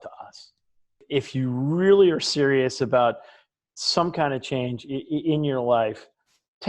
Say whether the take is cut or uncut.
cut